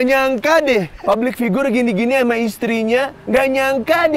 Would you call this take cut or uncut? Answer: cut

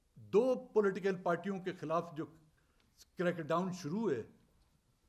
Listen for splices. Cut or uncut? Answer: uncut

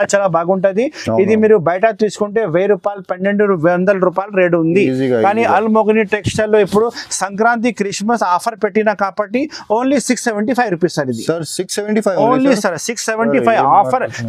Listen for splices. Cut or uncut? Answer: uncut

